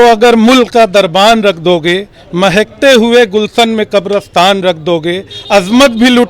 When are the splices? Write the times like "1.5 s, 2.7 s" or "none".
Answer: none